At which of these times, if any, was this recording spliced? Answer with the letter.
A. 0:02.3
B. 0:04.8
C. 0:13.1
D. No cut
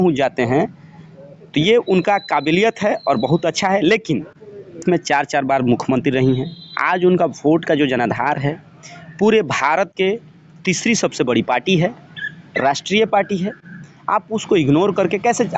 B